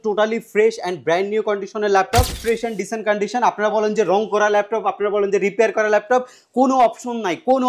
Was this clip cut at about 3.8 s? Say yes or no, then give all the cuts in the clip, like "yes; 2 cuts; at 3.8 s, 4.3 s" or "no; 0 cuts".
no; 1 cut; at 2.4 s